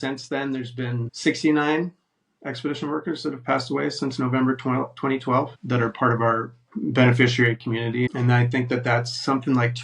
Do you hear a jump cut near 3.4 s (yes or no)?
no